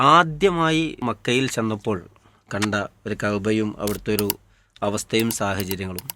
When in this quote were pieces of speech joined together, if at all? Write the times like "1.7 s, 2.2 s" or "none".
1.0 s